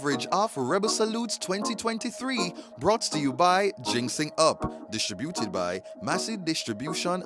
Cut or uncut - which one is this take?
uncut